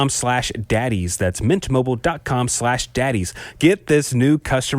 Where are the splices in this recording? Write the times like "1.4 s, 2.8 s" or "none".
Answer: 3.6 s